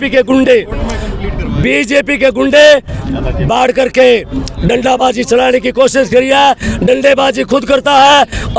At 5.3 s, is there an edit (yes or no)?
no